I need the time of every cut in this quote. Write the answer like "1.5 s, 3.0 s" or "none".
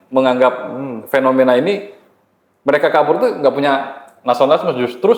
none

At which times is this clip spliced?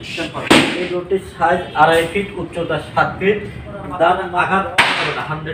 1.0 s, 4.4 s

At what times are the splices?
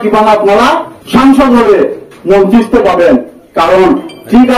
0.9 s

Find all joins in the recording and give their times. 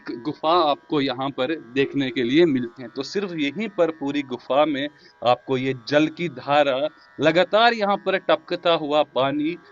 2.8 s

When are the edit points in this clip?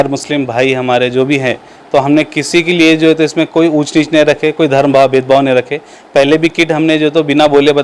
none

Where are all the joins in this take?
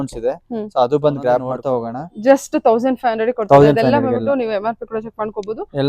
1.7 s

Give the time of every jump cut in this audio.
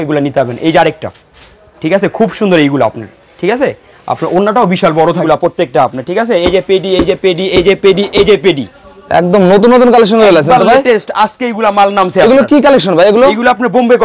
5.2 s

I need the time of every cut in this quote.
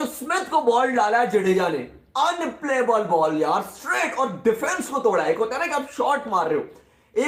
none

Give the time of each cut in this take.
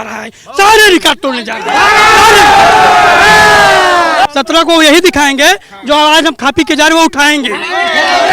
4.2 s

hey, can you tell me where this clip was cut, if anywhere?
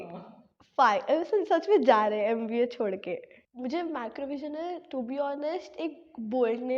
3.4 s

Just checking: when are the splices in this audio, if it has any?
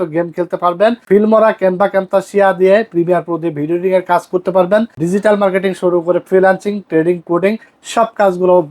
1.0 s, 4.9 s

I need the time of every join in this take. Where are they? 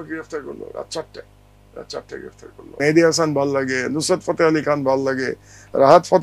2.8 s

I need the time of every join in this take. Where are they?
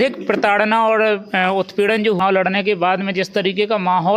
none

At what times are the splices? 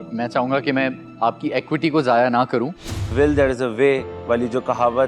3.1 s

